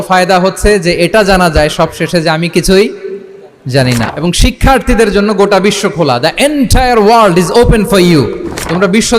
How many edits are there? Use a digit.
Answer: 1